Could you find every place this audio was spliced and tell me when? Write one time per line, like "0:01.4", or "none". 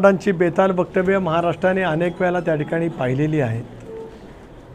none